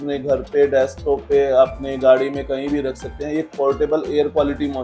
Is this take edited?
no; 0 cuts

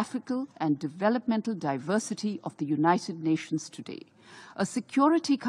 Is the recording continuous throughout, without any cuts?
yes; 0 cuts

